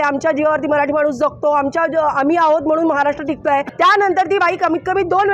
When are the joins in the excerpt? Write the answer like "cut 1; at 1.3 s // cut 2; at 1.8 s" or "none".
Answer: cut 1; at 3.7 s